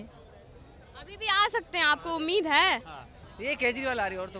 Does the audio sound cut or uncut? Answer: cut